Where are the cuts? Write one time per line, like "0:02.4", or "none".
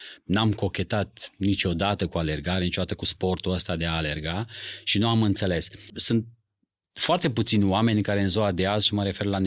0:06.0